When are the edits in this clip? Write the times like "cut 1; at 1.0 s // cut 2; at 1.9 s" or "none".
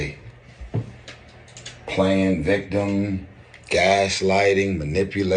cut 1; at 1.2 s